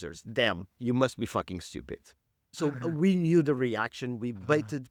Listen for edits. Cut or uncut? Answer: uncut